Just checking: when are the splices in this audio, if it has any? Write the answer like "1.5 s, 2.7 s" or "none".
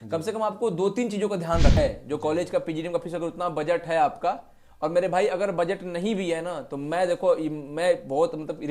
1.7 s